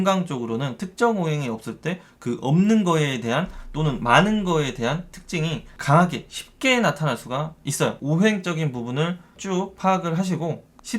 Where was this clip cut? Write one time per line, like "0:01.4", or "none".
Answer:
0:05.7
0:08.0